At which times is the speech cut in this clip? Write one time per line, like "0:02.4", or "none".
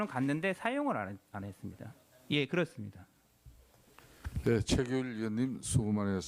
0:05.4